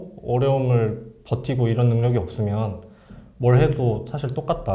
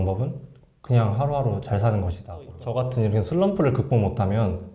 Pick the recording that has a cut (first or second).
second